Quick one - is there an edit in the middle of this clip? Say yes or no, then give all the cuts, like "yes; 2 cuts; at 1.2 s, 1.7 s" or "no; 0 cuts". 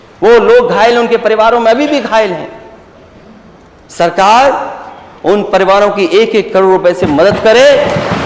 no; 0 cuts